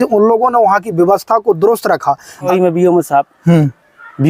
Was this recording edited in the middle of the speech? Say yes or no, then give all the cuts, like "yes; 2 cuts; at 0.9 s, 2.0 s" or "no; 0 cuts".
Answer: yes; 1 cut; at 2.5 s